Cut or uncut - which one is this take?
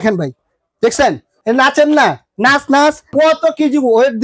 cut